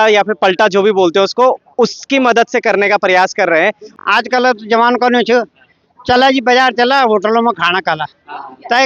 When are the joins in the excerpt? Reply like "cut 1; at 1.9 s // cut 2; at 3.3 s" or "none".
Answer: cut 1; at 3.9 s